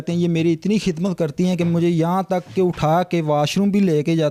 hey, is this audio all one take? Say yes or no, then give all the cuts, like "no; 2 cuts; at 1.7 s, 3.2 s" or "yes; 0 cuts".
yes; 0 cuts